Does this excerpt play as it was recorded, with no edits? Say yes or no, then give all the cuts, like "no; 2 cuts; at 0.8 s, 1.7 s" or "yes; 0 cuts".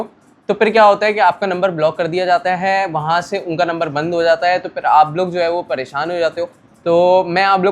yes; 0 cuts